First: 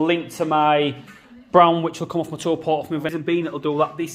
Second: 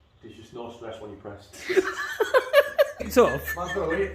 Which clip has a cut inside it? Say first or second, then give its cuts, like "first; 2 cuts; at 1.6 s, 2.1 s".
second; 1 cut; at 3.0 s